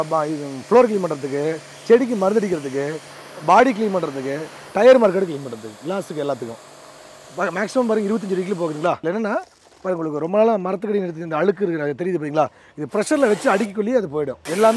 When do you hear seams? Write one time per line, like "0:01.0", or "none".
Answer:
none